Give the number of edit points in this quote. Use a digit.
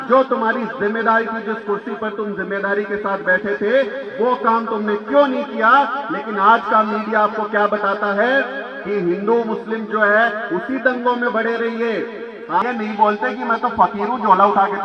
1